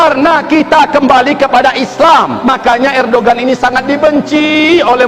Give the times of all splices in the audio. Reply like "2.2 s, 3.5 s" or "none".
2.4 s

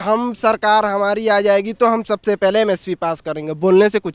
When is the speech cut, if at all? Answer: none

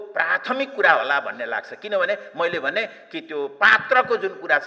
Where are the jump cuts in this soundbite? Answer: none

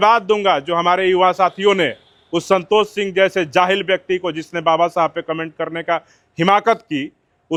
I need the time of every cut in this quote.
none

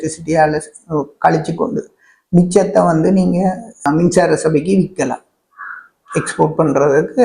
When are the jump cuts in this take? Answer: 3.9 s

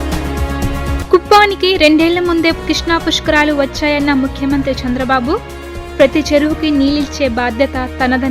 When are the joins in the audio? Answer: 0.9 s

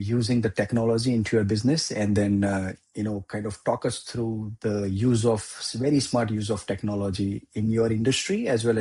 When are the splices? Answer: none

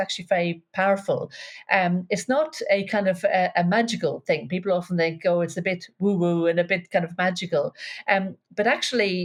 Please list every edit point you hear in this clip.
none

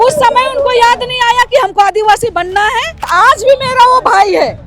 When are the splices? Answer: 3.0 s

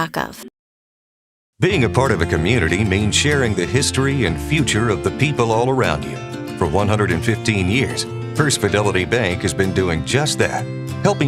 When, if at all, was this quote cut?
3.2 s

